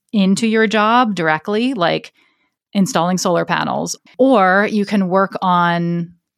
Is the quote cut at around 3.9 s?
yes; 1 cut; at 3.9 s

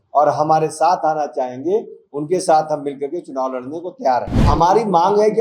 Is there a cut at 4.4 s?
yes; 1 cut; at 4.4 s

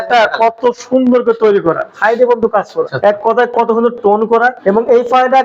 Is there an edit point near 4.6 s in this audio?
yes; 3 cuts; at 1.9 s, 2.9 s, 4.6 s

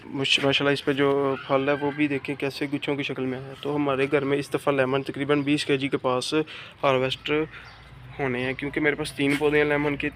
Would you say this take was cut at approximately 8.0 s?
no; 0 cuts

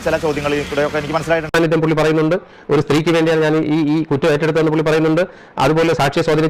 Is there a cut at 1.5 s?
yes; 1 cut; at 1.5 s

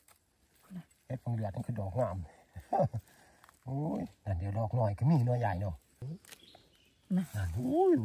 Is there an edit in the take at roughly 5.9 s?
yes; 1 cut; at 5.9 s

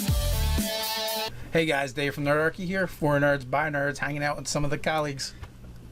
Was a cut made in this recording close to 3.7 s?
no; 0 cuts

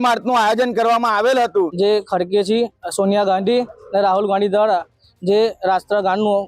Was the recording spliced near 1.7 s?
yes; 1 cut; at 1.7 s

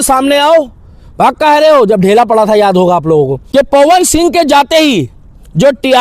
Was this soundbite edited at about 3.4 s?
yes; 1 cut; at 3.4 s

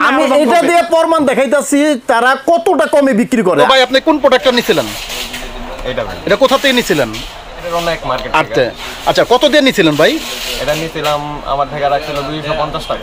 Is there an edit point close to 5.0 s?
no; 2 cuts; at 3.7 s, 7.7 s

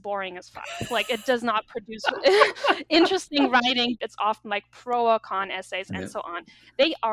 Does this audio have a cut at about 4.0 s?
yes; 1 cut; at 4.0 s

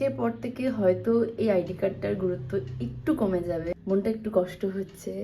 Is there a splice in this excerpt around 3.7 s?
yes; 1 cut; at 3.7 s

